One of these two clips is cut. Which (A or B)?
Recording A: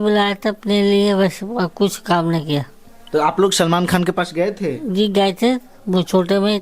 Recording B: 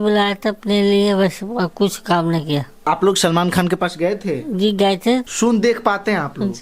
B